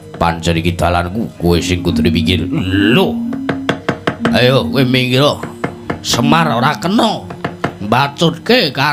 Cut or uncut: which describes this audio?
uncut